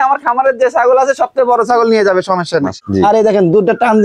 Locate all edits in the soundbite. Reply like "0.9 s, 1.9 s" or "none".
2.8 s